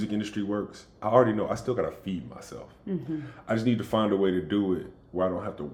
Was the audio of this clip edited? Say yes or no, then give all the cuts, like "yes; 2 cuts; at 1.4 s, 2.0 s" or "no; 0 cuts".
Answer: no; 0 cuts